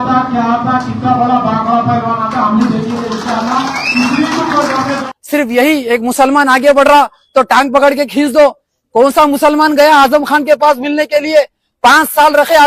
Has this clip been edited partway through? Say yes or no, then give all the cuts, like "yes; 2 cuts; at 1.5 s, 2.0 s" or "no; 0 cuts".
yes; 1 cut; at 5.0 s